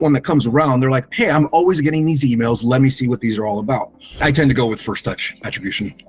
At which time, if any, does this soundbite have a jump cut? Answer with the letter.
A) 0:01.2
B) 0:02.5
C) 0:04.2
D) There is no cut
C